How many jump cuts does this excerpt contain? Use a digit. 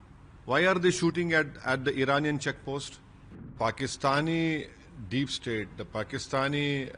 1